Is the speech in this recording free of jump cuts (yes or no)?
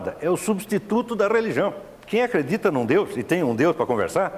no